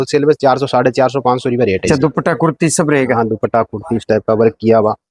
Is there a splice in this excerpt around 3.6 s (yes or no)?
no